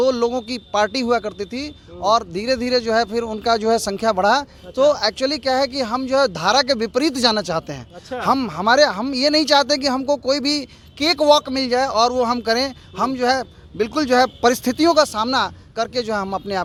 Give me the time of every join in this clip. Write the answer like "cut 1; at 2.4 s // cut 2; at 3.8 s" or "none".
none